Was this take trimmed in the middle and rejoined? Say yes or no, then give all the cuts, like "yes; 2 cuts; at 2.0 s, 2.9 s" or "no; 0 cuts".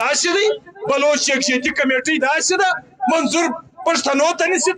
no; 0 cuts